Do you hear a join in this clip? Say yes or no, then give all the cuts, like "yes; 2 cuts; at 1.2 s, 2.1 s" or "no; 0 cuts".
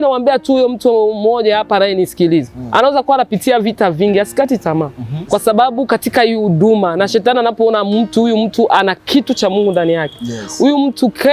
yes; 1 cut; at 5.1 s